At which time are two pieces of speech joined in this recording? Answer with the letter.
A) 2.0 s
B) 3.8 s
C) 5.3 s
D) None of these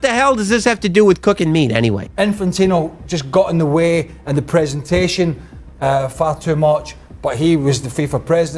A